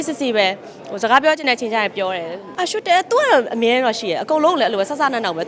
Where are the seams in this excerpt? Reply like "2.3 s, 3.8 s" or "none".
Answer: 2.4 s